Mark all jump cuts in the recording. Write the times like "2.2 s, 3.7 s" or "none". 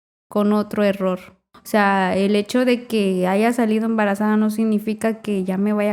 1.4 s